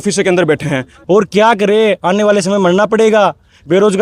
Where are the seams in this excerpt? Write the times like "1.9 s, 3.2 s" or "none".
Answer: 1.0 s

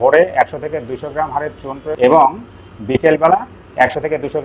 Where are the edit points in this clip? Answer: 2.0 s

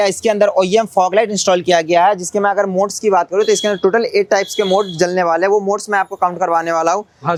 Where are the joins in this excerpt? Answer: none

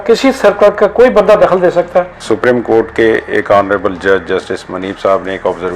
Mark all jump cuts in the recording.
2.3 s

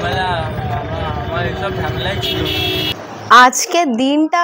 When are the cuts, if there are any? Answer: 3.0 s

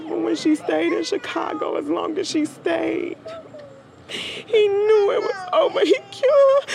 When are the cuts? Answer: none

